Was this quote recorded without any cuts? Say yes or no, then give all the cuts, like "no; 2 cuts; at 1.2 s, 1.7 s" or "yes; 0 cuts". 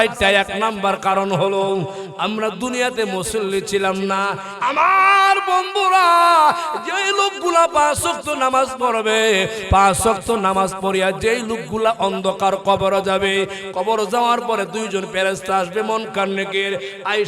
no; 1 cut; at 4.5 s